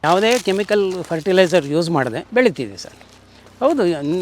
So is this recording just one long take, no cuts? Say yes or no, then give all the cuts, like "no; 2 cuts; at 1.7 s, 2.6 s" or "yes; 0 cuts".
no; 1 cut; at 2.2 s